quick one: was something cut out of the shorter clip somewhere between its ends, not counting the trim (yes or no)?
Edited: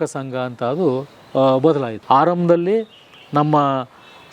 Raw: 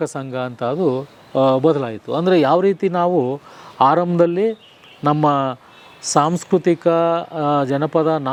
yes